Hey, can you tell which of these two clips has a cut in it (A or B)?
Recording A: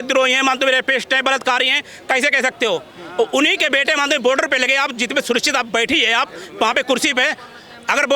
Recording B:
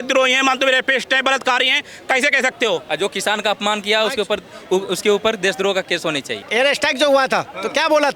B